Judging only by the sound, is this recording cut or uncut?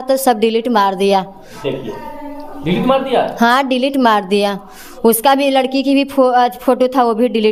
uncut